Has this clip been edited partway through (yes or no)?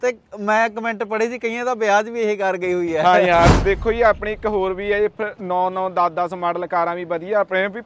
yes